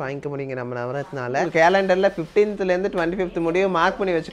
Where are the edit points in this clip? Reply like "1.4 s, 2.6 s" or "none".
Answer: 1.4 s

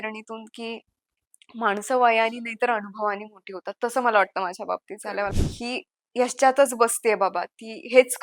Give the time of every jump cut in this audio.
5.3 s

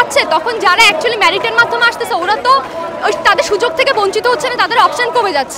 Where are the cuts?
none

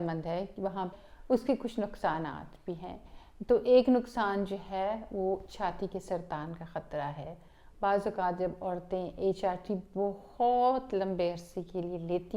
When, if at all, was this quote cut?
1.0 s

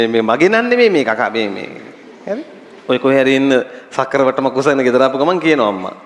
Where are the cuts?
2.6 s

